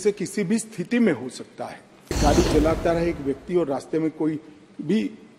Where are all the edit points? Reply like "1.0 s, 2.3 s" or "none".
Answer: 2.2 s